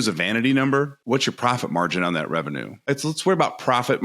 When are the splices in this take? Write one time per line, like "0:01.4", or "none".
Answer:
0:01.0
0:02.7